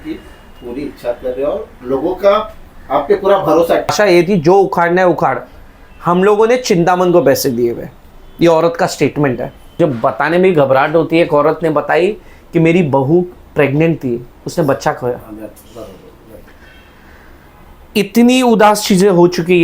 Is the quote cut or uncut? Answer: cut